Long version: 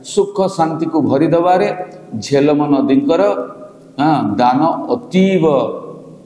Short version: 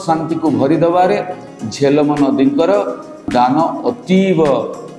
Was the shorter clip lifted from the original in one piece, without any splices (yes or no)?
no